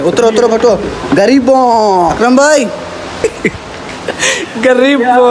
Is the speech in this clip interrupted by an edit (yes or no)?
yes